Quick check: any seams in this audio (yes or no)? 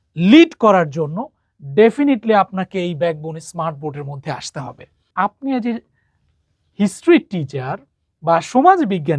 yes